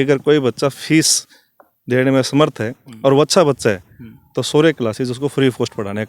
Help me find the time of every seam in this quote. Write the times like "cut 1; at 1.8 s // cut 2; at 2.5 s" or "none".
none